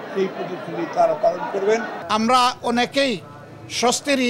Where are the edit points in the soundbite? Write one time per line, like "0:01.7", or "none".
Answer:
0:02.0

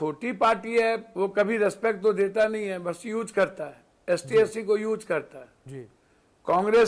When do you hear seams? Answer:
0:01.1

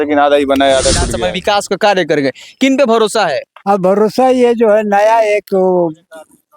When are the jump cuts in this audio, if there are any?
0:01.1

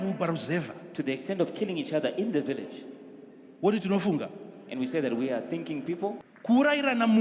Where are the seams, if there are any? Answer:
0:06.3

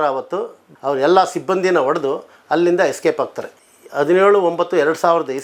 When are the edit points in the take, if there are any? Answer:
none

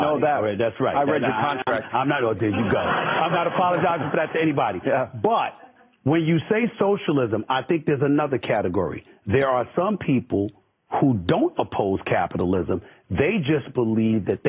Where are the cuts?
0:01.5

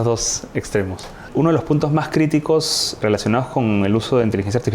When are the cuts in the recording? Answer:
0:01.3
0:03.0

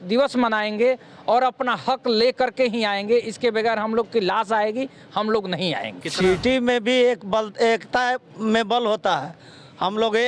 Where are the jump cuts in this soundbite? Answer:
0:06.0

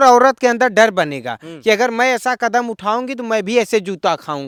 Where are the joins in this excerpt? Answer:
none

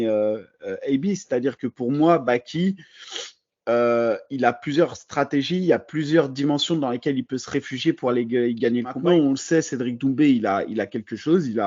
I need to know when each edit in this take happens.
0:09.0

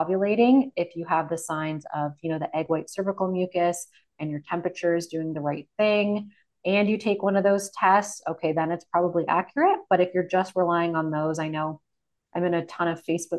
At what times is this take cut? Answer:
none

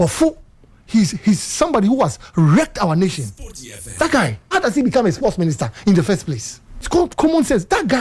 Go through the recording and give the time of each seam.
0:04.4
0:06.9

